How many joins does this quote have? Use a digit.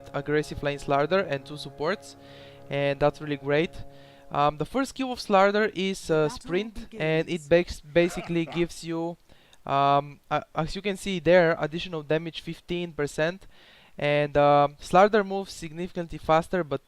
1